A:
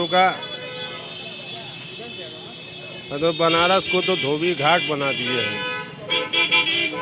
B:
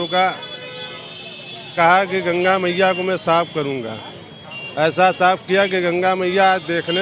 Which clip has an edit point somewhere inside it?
B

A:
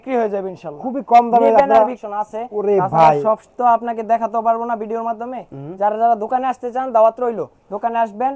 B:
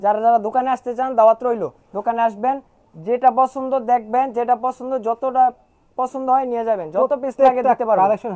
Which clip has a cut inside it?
A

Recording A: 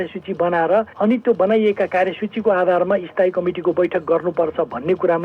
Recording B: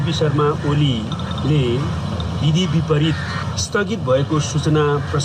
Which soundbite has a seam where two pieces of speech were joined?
A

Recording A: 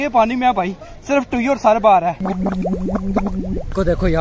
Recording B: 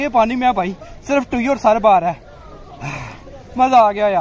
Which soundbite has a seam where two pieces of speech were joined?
A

